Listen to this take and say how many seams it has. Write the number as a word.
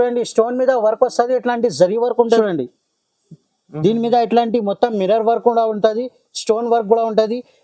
one